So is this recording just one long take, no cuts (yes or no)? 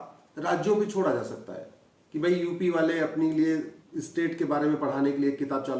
no